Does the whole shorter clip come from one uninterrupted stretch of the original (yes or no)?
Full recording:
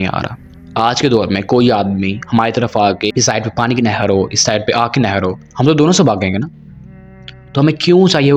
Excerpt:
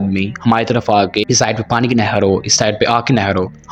yes